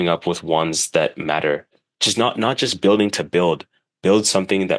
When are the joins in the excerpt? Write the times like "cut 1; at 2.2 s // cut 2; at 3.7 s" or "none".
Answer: cut 1; at 1.8 s